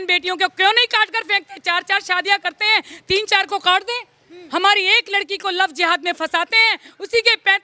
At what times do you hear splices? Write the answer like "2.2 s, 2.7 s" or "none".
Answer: none